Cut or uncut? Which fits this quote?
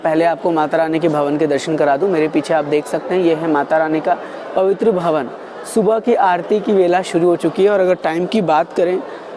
uncut